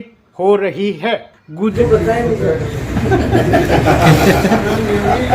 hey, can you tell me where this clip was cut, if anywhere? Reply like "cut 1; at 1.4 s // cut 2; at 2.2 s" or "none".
cut 1; at 1.7 s